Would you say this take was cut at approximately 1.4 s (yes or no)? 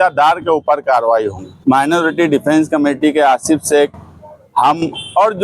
yes